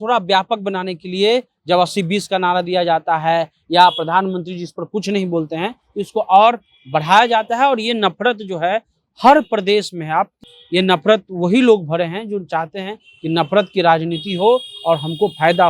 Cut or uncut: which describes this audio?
cut